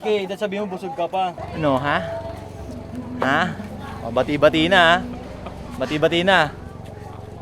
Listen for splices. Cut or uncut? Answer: cut